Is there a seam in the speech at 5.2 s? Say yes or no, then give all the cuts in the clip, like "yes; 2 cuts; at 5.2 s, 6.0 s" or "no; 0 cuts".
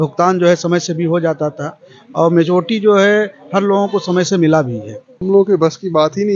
yes; 1 cut; at 5.2 s